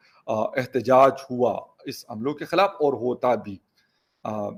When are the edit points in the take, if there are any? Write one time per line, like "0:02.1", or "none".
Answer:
none